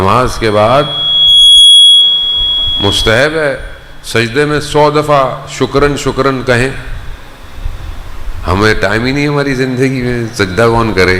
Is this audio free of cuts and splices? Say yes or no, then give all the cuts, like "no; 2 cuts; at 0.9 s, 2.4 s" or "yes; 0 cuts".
yes; 0 cuts